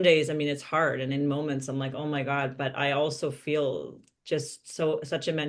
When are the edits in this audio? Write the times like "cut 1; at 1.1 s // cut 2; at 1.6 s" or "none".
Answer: none